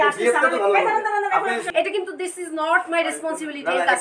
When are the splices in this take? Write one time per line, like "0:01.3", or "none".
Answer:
0:01.6